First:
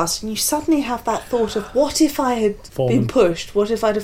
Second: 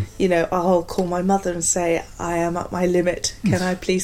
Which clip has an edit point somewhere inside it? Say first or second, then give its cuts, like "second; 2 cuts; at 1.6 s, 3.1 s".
first; 1 cut; at 2.7 s